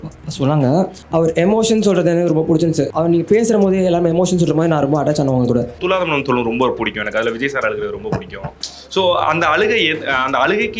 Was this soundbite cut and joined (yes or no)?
yes